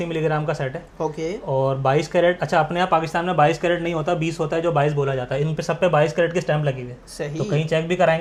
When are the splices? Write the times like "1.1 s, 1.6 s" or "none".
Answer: none